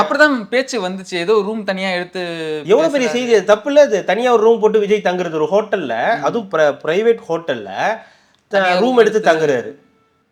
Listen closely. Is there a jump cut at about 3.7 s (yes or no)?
no